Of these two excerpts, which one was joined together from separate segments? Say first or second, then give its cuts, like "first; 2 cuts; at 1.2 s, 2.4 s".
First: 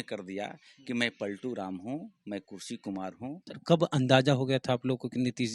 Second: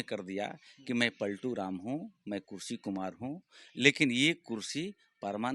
first; 1 cut; at 3.5 s